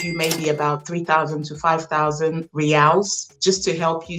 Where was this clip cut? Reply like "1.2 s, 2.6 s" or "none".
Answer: none